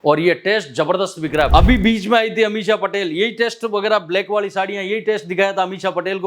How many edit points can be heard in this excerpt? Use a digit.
1